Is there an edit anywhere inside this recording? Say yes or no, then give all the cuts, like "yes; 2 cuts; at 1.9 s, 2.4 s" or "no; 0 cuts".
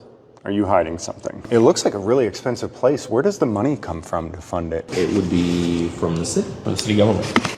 yes; 3 cuts; at 1.5 s, 4.9 s, 6.6 s